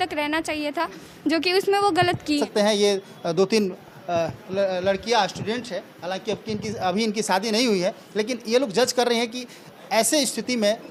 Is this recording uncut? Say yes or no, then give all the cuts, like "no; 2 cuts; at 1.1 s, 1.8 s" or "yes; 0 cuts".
yes; 0 cuts